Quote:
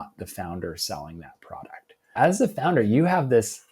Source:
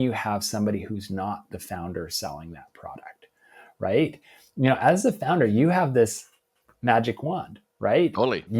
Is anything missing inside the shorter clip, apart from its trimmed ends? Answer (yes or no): yes